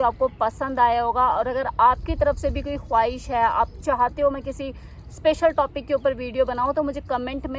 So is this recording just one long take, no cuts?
yes; 0 cuts

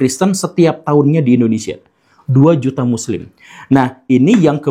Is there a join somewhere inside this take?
no; 0 cuts

